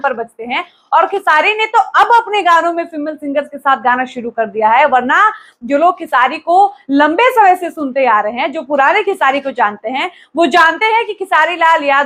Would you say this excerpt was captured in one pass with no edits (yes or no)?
yes